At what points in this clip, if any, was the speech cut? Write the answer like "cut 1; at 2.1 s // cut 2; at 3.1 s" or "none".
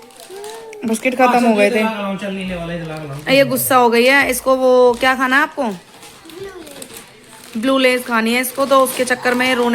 none